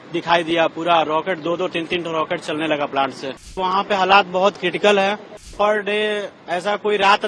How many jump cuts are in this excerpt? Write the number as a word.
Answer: two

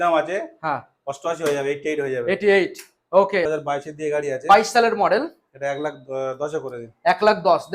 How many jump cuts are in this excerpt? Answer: one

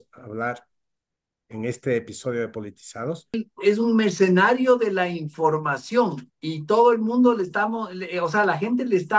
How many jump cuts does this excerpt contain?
one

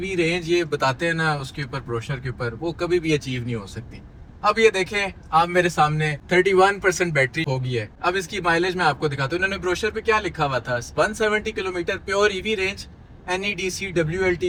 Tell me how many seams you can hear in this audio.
zero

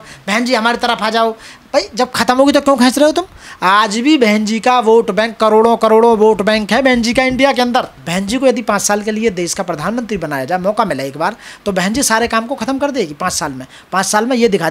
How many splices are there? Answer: one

